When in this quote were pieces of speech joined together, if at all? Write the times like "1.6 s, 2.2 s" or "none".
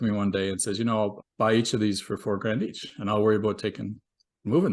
1.2 s